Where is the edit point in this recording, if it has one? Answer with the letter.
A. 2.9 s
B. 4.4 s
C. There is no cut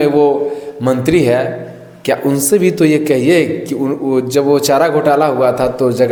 C